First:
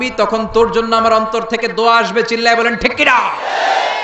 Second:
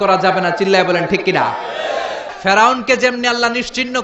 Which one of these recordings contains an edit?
second; 1 cut; at 2.3 s

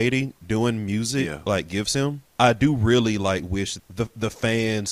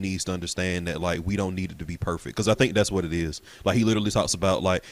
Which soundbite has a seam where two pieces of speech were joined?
first; 2 cuts; at 2.3 s, 3.7 s

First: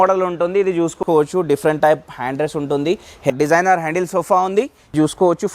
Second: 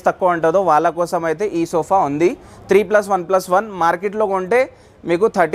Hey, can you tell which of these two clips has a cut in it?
first; 2 cuts; at 1.0 s, 3.3 s

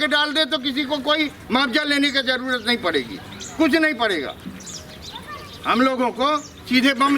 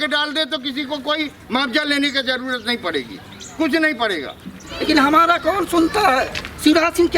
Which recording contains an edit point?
second; 1 cut; at 4.9 s

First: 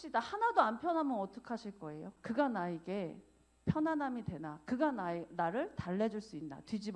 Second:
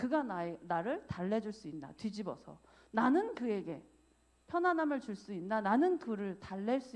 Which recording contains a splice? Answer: first; 1 cut; at 2.1 s

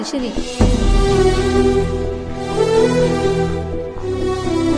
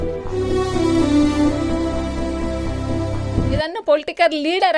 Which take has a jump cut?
second; 1 cut; at 3.7 s

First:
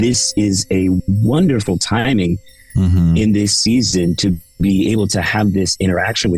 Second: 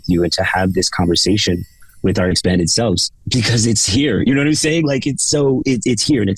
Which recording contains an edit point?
second; 1 cut; at 3.1 s

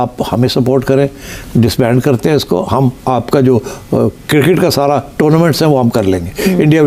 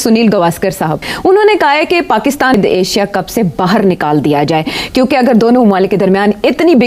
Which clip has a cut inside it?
second; 2 cuts; at 1.1 s, 2.5 s

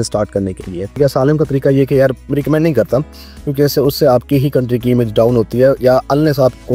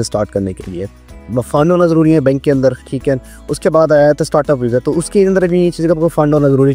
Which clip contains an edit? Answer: first; 1 cut; at 1.0 s

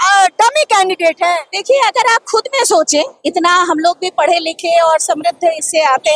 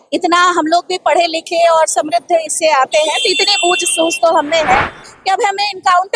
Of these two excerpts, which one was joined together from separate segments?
second; 1 cut; at 5.1 s

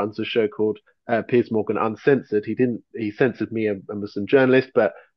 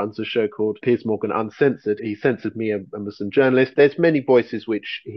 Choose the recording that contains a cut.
second; 3 cuts; at 0.8 s, 2.0 s, 3.7 s

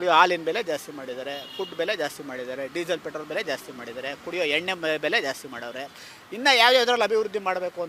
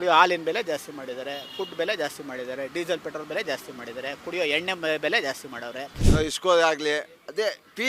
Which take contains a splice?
second; 1 cut; at 6.0 s

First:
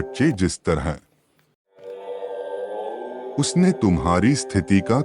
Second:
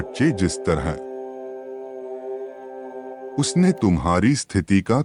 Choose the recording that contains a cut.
first; 2 cuts; at 1.5 s, 3.3 s

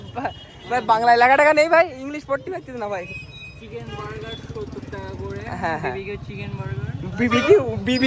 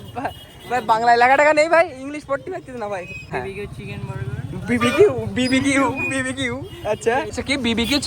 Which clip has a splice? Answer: second; 2 cuts; at 3.3 s, 7.3 s

